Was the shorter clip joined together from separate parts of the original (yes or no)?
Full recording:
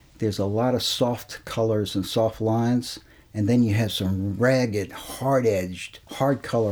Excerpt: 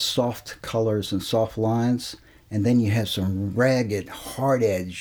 no